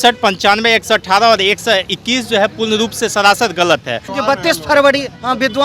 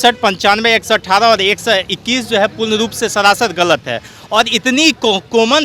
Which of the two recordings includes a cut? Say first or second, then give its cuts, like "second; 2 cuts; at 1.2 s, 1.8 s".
first; 1 cut; at 4.1 s